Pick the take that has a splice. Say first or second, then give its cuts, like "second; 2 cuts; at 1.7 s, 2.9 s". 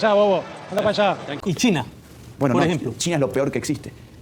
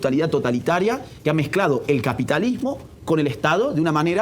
first; 1 cut; at 1.3 s